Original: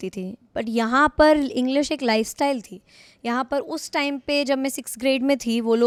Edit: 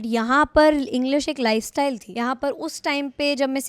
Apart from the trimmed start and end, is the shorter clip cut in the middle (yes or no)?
yes